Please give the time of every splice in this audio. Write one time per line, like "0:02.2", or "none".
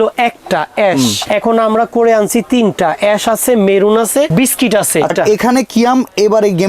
0:01.2
0:04.3
0:05.1